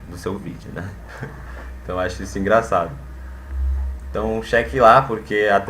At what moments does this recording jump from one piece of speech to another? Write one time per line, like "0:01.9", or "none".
0:02.7